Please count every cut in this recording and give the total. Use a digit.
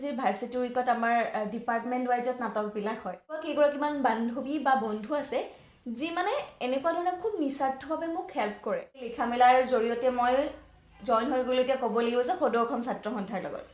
2